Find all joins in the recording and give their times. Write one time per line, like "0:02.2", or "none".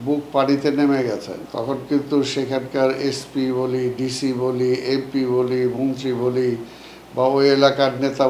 0:01.4